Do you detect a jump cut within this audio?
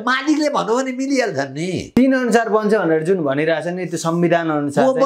yes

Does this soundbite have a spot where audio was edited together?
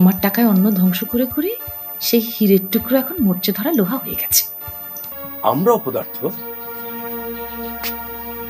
yes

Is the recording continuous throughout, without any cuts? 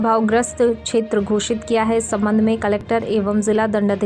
yes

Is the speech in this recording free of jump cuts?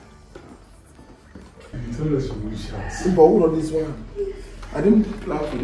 no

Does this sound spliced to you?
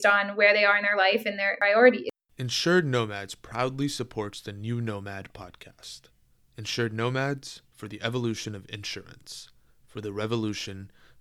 yes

